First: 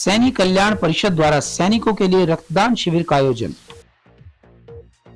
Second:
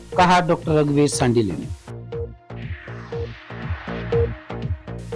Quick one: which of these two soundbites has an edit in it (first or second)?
first